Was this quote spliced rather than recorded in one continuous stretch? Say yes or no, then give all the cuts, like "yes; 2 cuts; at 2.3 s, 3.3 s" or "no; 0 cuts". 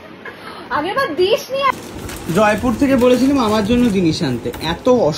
yes; 1 cut; at 1.7 s